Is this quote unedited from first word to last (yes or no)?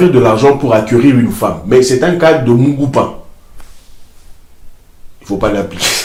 yes